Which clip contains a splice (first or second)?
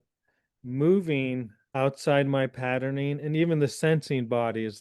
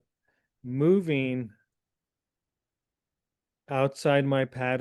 first